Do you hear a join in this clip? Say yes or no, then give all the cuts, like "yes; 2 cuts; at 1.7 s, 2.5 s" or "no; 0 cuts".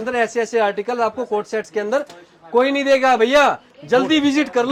no; 0 cuts